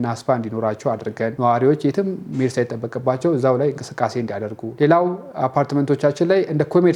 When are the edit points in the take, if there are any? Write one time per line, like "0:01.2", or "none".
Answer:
none